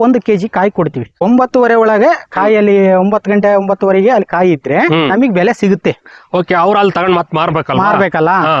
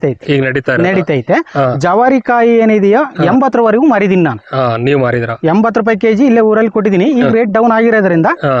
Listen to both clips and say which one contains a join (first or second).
first